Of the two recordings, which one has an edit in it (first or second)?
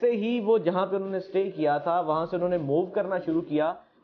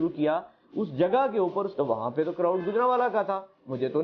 second